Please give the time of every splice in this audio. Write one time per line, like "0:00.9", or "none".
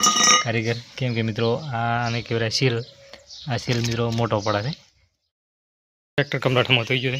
0:05.5